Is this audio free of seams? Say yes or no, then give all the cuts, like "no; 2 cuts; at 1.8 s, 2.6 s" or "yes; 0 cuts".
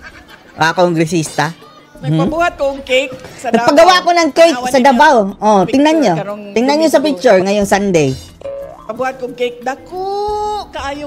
yes; 0 cuts